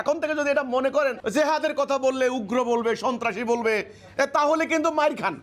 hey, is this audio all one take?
no; 1 cut; at 1.2 s

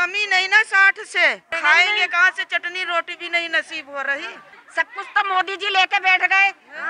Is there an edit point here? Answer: yes; 1 cut; at 4.6 s

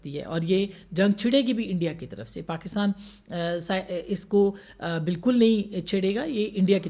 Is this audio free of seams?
yes; 0 cuts

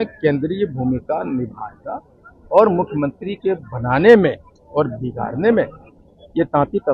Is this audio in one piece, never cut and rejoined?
yes; 0 cuts

